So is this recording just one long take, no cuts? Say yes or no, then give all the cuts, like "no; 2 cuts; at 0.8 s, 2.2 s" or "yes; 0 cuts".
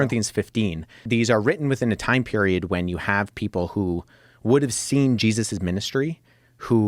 no; 1 cut; at 0.9 s